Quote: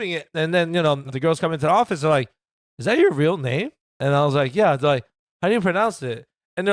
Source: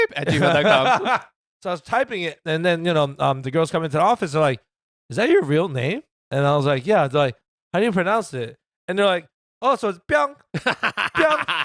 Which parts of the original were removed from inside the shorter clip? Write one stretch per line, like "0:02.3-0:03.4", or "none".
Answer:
0:03.2-0:03.4